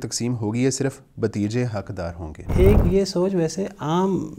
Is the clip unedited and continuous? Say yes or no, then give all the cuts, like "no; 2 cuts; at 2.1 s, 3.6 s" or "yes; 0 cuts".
no; 1 cut; at 2.4 s